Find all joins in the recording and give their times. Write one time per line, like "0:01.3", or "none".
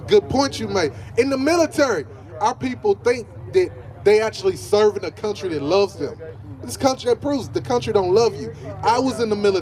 none